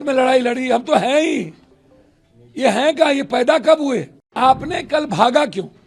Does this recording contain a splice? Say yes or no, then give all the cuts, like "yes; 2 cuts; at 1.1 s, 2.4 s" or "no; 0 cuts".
yes; 1 cut; at 4.3 s